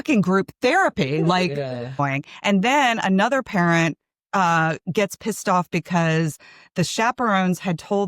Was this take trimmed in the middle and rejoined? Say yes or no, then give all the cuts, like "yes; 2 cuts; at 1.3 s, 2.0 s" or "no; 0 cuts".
yes; 1 cut; at 2.0 s